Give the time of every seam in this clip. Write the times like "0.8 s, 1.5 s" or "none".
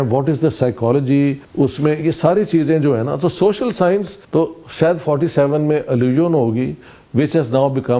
1.4 s, 4.2 s